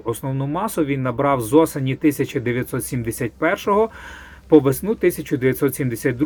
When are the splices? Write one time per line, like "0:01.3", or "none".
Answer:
none